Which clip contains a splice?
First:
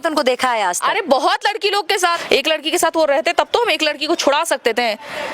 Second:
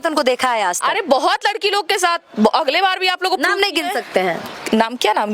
first; 1 cut; at 2.2 s

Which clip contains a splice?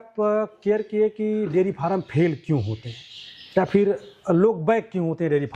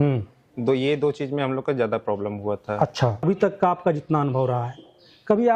second; 1 cut; at 3.2 s

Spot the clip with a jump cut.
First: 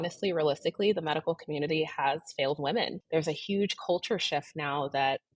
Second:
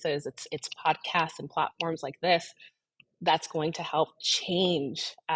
first; 1 cut; at 3.0 s

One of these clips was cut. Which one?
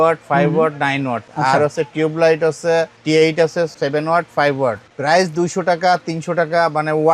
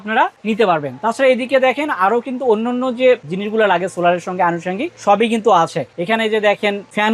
first; 3 cuts; at 1.2 s, 3.7 s, 4.8 s

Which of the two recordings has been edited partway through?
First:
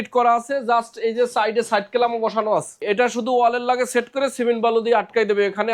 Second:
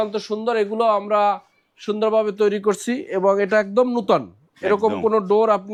first; 1 cut; at 2.8 s

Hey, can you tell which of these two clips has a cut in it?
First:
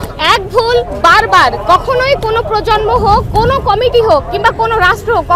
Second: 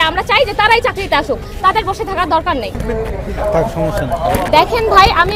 second; 1 cut; at 2.8 s

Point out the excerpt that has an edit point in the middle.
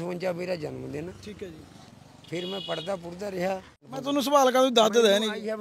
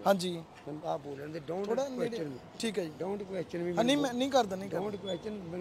first; 1 cut; at 3.9 s

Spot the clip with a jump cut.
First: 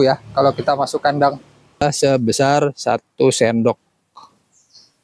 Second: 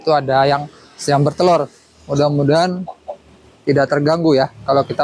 first; 1 cut; at 1.8 s

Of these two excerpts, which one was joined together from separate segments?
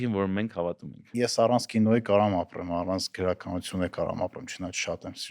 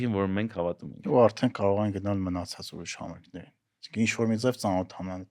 first; 1 cut; at 1.0 s

